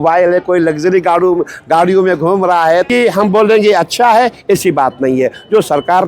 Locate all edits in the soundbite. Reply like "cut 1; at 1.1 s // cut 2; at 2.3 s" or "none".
cut 1; at 2.9 s